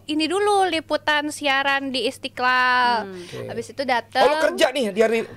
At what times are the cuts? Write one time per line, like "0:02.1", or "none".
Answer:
none